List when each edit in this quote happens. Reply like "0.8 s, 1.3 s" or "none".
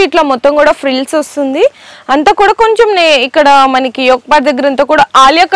none